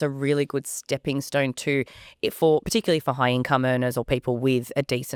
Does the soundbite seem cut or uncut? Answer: uncut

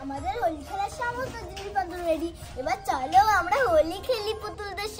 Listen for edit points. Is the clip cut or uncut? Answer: uncut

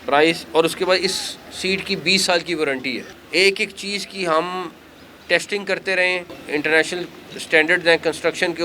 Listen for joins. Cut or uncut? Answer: cut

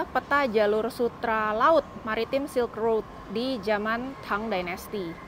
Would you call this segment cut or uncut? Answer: uncut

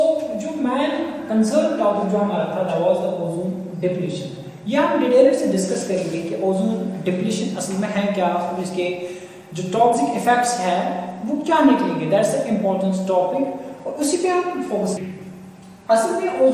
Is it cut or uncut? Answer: cut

